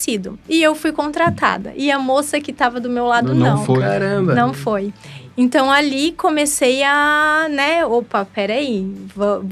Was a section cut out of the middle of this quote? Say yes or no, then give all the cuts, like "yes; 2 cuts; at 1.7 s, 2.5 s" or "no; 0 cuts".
no; 0 cuts